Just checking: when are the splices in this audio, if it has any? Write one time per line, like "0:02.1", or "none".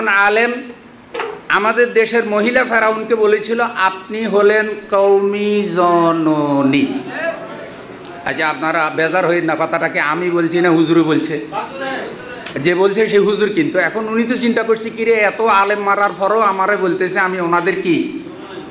none